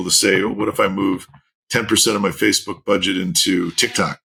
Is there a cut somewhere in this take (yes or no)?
no